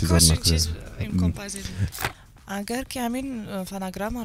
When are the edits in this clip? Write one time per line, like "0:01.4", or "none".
0:02.0